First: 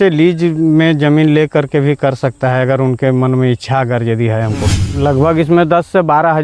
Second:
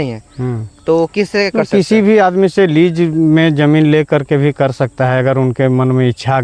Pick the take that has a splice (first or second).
first